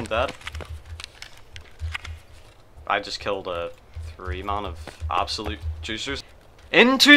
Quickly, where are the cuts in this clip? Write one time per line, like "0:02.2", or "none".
0:06.1